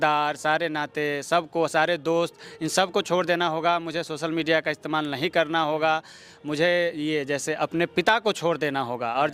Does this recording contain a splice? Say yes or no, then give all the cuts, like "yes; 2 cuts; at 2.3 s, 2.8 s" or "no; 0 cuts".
no; 0 cuts